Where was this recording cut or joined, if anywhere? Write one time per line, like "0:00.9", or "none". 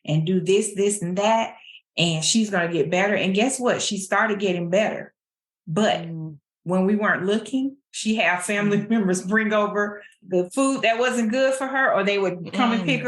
0:10.2